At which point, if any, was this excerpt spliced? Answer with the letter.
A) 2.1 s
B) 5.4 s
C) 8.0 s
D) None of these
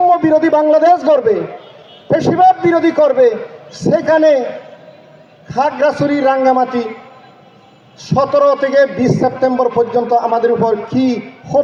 D